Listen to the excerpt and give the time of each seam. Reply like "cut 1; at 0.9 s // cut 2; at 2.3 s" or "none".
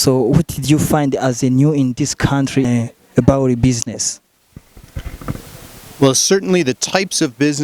cut 1; at 2.7 s